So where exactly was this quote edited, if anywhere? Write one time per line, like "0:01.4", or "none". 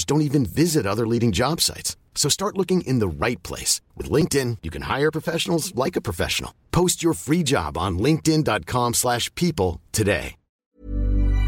0:10.5